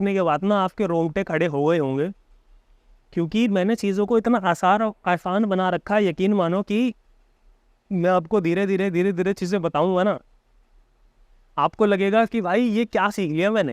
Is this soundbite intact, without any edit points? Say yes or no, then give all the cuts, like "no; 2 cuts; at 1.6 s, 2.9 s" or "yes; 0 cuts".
yes; 0 cuts